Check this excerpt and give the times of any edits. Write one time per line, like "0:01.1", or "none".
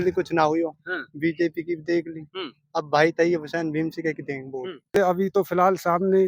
0:04.9

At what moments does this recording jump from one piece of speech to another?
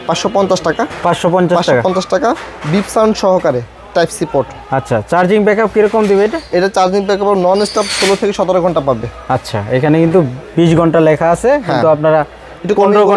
none

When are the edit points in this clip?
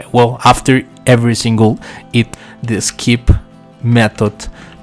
0:02.4

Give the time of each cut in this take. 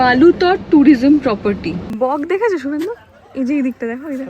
0:01.9

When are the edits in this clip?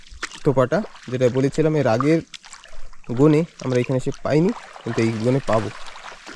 none

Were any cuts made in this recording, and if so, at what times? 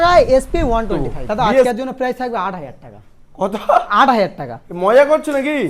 0:01.6

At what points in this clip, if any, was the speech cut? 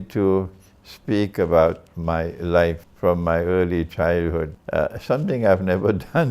0:02.9
0:04.6

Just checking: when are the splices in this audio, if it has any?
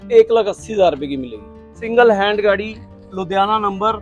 0:01.7

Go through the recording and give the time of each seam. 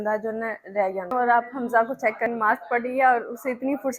0:01.1
0:02.3

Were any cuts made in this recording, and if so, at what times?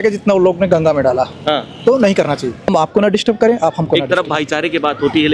0:02.7

